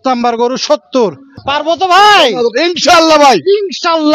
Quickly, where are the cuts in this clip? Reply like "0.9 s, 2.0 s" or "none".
1.4 s